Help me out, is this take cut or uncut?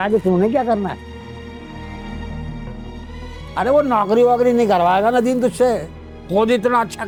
uncut